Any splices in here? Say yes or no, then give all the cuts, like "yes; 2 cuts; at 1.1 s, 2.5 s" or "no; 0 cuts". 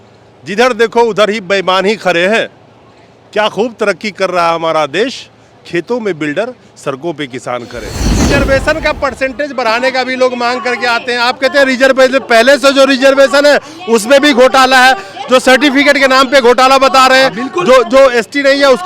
yes; 1 cut; at 8.2 s